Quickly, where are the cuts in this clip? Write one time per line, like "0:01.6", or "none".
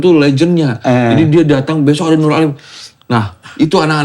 0:02.8